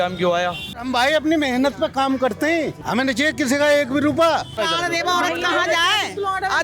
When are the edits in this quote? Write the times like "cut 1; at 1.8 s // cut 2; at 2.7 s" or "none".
cut 1; at 0.8 s // cut 2; at 2.8 s // cut 3; at 4.6 s